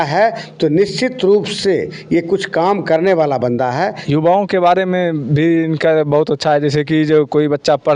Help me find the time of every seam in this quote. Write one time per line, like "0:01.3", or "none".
0:04.0